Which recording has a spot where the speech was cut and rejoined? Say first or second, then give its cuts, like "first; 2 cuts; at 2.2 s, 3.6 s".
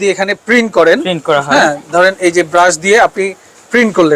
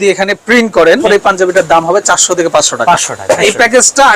second; 2 cuts; at 1.0 s, 3.4 s